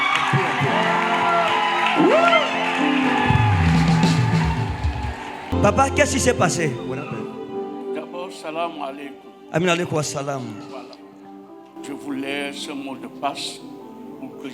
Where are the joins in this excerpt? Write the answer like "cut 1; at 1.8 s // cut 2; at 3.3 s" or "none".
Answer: none

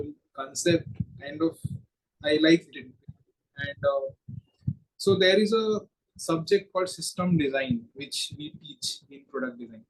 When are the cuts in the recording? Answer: none

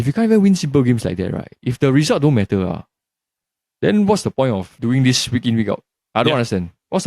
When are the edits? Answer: cut 1; at 4.7 s

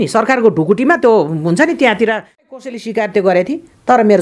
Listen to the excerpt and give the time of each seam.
cut 1; at 2.6 s

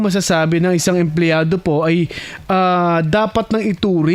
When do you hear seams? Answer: none

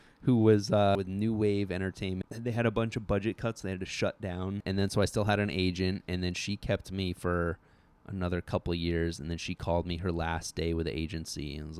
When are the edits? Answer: cut 1; at 0.9 s // cut 2; at 2.3 s // cut 3; at 4.6 s

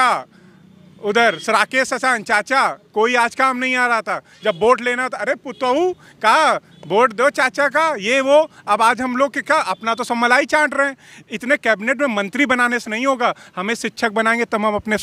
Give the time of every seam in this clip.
none

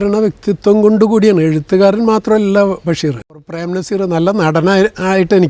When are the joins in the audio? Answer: cut 1; at 3.4 s

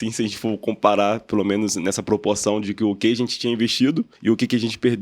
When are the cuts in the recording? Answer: cut 1; at 4.1 s

